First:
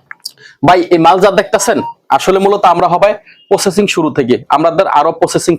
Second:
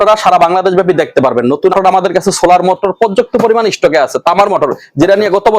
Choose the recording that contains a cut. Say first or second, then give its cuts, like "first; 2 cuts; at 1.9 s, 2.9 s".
second; 1 cut; at 1.7 s